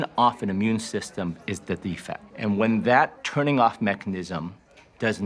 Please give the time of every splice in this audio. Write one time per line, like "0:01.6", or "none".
0:02.3